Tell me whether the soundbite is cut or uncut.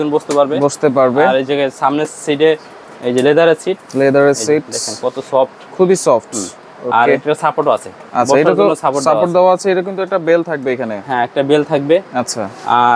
uncut